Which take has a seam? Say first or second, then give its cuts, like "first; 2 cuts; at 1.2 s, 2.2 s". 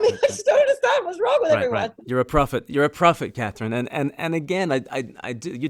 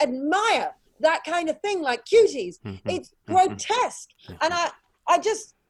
first; 1 cut; at 2.0 s